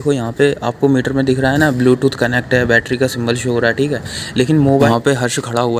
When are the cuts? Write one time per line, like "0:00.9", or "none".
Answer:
0:04.9